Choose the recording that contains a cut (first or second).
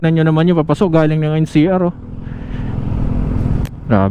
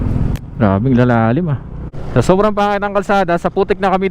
second